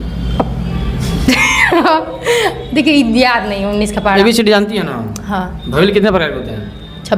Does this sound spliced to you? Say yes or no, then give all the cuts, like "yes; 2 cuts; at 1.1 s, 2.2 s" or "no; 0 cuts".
yes; 1 cut; at 4.2 s